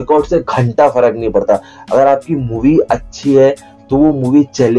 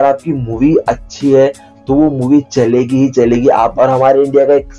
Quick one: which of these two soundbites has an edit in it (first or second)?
second